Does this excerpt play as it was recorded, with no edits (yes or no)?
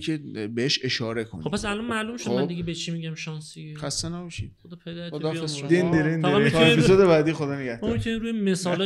yes